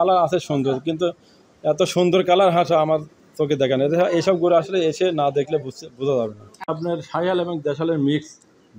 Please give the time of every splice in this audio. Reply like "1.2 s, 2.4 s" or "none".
6.8 s